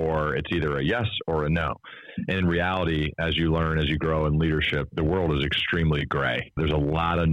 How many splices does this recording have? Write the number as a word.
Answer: two